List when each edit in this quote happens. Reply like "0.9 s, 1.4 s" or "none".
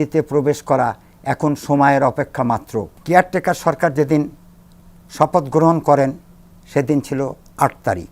2.9 s